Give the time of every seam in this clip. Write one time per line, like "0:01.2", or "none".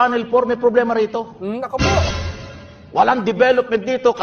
0:01.2